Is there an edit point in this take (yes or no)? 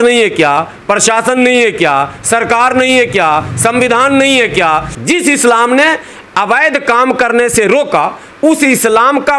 yes